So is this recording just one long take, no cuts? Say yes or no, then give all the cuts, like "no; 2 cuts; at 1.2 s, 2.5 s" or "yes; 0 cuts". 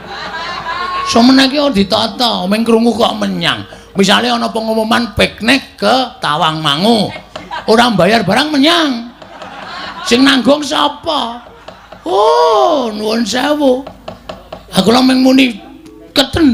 yes; 0 cuts